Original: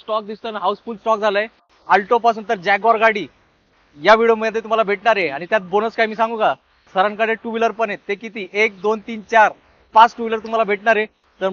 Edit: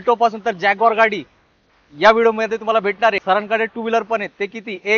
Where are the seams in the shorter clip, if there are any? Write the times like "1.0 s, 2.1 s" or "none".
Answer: 3.2 s